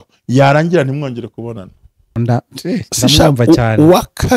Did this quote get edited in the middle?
yes; 1 cut; at 2.1 s

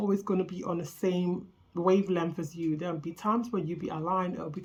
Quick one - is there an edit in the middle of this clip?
no; 0 cuts

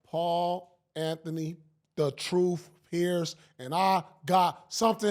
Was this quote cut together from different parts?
no; 0 cuts

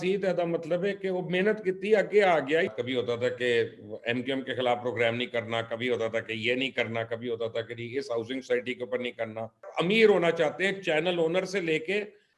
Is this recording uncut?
no; 2 cuts; at 2.7 s, 9.6 s

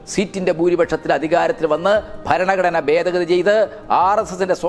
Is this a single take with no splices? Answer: yes; 0 cuts

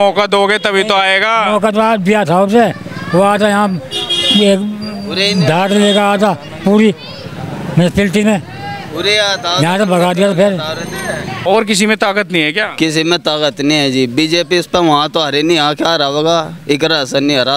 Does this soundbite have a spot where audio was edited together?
yes; 1 cut; at 11.3 s

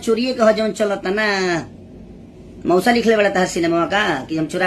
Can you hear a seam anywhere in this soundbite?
no; 0 cuts

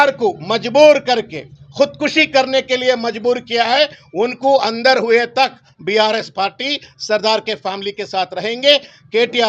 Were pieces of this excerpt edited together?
no; 0 cuts

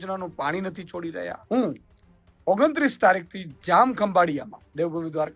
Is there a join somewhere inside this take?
yes; 1 cut; at 1.3 s

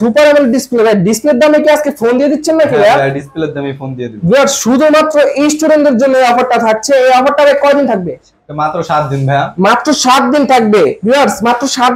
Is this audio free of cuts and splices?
yes; 0 cuts

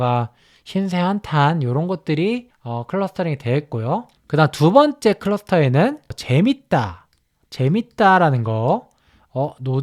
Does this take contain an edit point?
yes; 2 cuts; at 4.1 s, 6.2 s

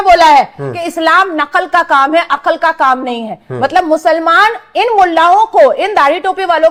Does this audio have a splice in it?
no; 0 cuts

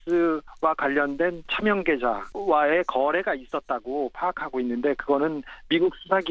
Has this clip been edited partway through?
yes; 1 cut; at 1.4 s

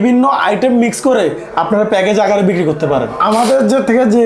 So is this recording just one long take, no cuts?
no; 1 cut; at 3.2 s

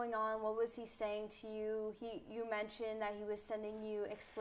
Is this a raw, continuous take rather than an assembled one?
yes; 0 cuts

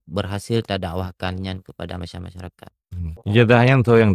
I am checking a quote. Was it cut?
yes; 1 cut; at 3.2 s

